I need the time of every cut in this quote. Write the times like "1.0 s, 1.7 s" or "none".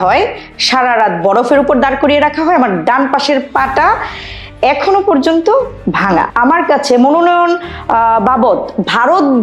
6.3 s